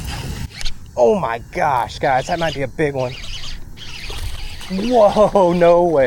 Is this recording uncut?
yes; 0 cuts

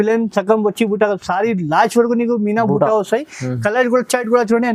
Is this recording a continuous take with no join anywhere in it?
yes; 0 cuts

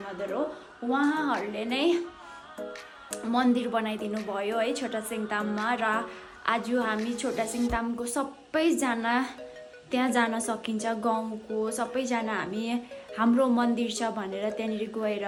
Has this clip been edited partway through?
no; 0 cuts

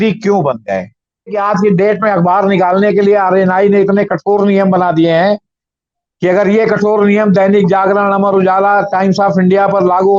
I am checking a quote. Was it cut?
yes; 1 cut; at 1.4 s

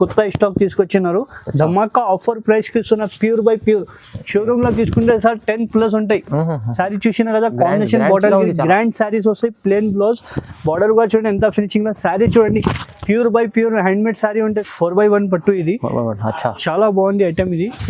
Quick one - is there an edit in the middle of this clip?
yes; 1 cut; at 14.6 s

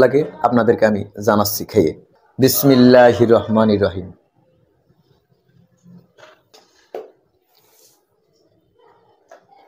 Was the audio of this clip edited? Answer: no; 0 cuts

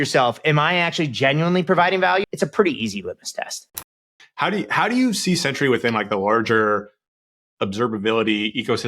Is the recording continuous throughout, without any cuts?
no; 2 cuts; at 2.2 s, 3.8 s

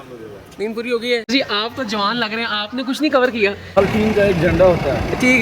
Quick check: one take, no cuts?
no; 2 cuts; at 1.3 s, 3.7 s

